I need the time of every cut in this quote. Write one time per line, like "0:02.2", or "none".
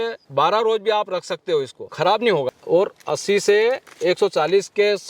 0:02.5